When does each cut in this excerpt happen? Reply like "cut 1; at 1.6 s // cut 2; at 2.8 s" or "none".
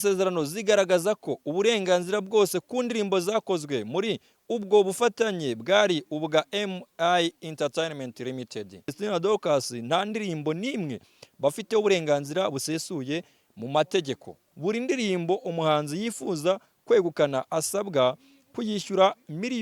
cut 1; at 9.0 s // cut 2; at 14.5 s